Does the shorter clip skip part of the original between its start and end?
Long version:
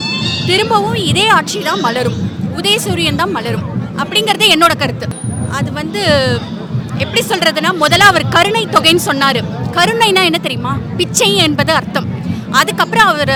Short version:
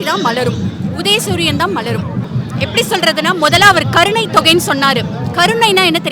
yes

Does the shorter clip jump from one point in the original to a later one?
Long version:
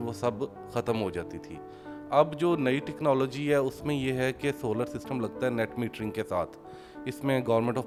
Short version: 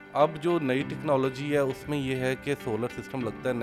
no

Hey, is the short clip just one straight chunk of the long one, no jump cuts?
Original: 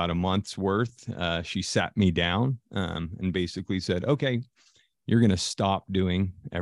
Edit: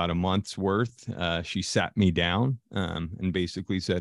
yes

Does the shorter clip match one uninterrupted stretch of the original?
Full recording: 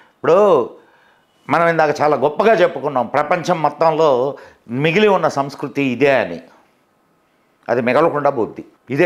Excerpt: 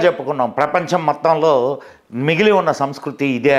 yes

